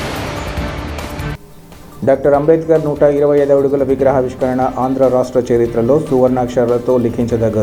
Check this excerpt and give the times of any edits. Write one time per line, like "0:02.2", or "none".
none